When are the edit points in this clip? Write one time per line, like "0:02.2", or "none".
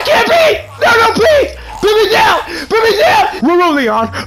0:03.4